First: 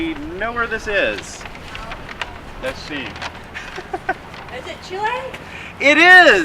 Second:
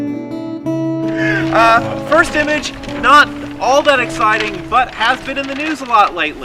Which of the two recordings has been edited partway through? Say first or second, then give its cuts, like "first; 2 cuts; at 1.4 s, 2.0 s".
first; 1 cut; at 3.9 s